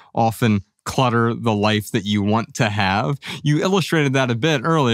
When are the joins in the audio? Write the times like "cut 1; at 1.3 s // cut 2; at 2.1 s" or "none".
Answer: none